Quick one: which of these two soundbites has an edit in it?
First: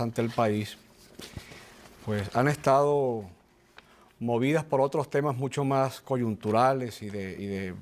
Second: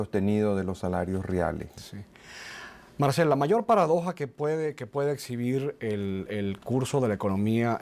first; 1 cut; at 6.1 s

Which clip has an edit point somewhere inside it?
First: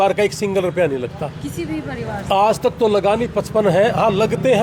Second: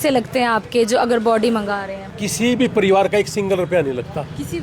second; 1 cut; at 1.9 s

